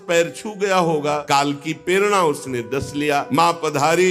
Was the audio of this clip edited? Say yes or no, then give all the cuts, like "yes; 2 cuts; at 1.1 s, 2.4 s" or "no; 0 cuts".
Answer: yes; 2 cuts; at 1.2 s, 3.3 s